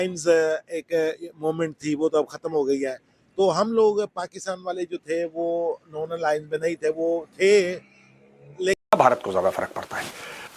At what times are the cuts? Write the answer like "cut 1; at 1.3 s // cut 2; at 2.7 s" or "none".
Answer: cut 1; at 8.8 s

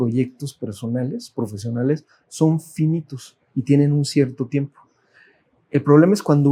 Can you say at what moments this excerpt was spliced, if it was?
none

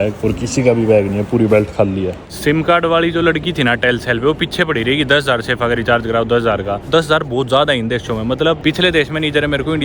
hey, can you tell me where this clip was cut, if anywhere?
cut 1; at 2.3 s // cut 2; at 6.9 s // cut 3; at 8.6 s

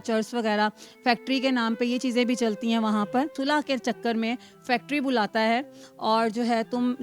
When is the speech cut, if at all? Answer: cut 1; at 3.4 s // cut 2; at 5.8 s

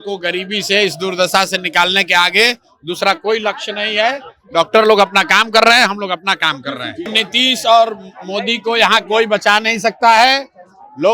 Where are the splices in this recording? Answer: cut 1; at 7.1 s

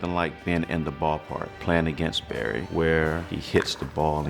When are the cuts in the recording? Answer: cut 1; at 1.5 s // cut 2; at 2.7 s

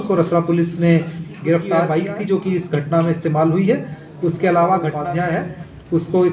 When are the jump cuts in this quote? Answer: cut 1; at 1.9 s // cut 2; at 5.1 s

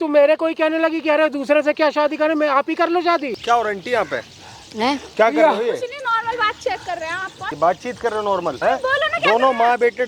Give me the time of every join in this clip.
cut 1; at 3.3 s // cut 2; at 7.4 s // cut 3; at 8.6 s

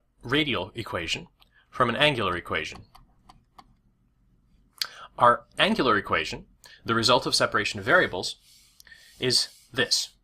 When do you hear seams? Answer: cut 1; at 3.9 s

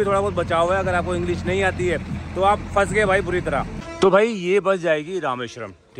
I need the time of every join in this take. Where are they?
cut 1; at 3.8 s

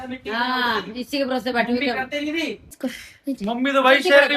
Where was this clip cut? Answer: cut 1; at 2.8 s

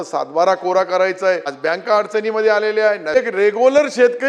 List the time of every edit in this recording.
cut 1; at 1.5 s // cut 2; at 3.2 s

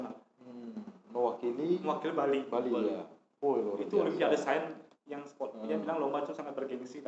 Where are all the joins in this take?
none

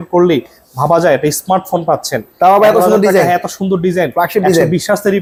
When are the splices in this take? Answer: none

